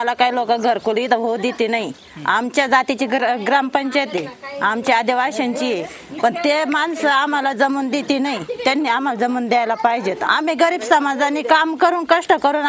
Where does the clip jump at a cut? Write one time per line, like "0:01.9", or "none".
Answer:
0:10.2